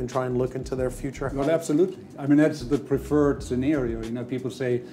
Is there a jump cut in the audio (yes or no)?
no